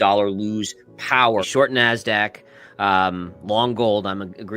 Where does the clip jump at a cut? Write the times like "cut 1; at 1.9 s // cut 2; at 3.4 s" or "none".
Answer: cut 1; at 1.5 s